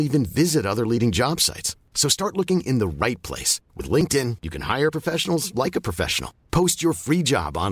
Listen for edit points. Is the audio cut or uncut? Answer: uncut